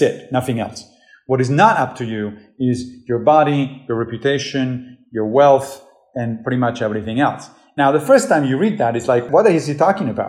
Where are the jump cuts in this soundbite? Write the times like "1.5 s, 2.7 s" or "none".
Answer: 9.3 s